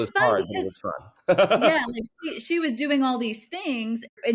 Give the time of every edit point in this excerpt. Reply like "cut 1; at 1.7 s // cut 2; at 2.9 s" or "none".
none